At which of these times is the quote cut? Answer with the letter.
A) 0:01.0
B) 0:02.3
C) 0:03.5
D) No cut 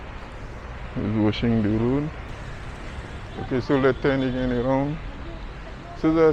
B